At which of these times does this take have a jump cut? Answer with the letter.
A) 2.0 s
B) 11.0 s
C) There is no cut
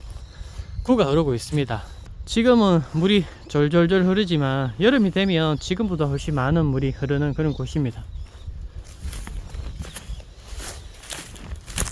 B